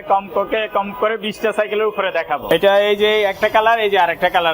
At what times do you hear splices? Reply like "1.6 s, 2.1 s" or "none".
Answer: 2.5 s

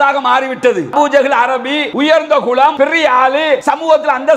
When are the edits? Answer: 0.9 s, 1.9 s, 2.7 s, 3.6 s

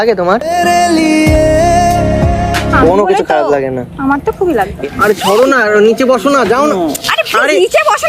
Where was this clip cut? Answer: 4.8 s

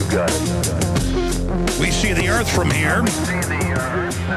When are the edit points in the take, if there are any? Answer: 3.3 s

